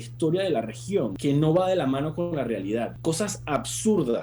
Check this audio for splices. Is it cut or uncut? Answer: cut